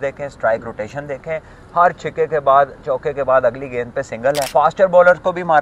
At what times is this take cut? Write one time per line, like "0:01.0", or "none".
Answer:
0:04.5